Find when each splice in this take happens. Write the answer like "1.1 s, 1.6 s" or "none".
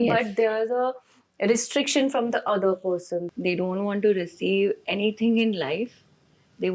3.3 s